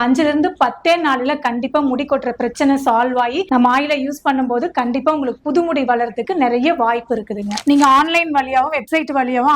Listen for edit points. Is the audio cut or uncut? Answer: cut